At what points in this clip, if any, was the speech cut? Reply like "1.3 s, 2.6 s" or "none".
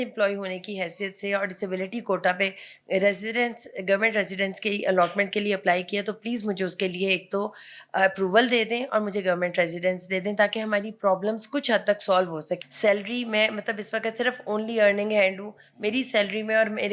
12.5 s